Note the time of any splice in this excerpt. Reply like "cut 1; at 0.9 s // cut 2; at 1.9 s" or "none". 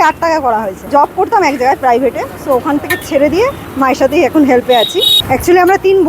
cut 1; at 0.9 s // cut 2; at 3.6 s // cut 3; at 5.2 s